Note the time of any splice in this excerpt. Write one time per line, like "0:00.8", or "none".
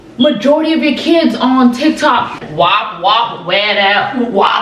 none